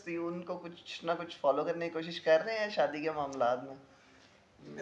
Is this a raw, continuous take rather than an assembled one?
yes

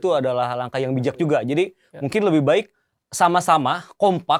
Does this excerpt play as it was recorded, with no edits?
yes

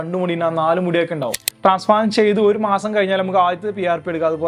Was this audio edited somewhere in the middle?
yes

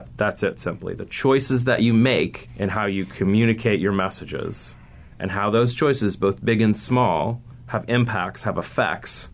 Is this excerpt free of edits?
no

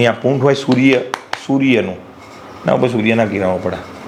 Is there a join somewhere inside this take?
no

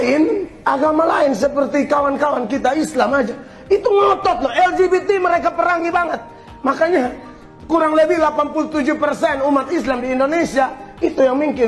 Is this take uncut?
yes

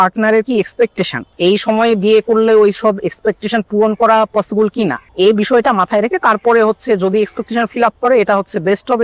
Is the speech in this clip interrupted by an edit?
yes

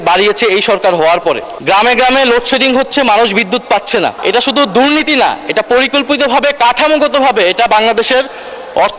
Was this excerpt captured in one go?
no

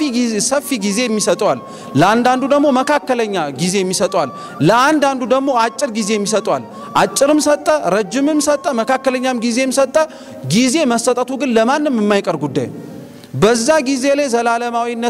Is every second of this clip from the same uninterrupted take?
yes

